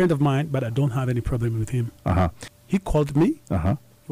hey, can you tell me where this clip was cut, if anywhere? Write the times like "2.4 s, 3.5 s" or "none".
2.4 s